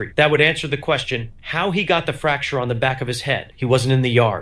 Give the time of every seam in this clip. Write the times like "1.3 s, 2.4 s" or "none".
3.5 s